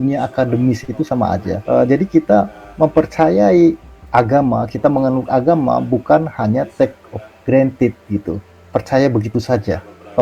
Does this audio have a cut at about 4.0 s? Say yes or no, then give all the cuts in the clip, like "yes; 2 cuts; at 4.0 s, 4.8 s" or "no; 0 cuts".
no; 1 cut; at 1.5 s